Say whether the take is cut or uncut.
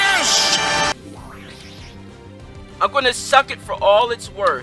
cut